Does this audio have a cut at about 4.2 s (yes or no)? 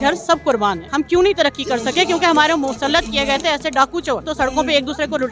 yes